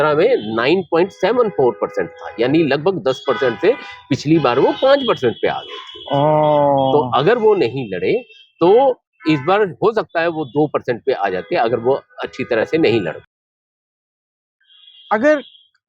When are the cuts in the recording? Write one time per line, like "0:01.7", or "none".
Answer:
none